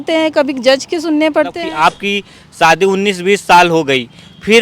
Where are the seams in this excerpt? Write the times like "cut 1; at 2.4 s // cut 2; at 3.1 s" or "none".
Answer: cut 1; at 1.6 s